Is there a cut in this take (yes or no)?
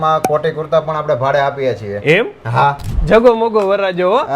yes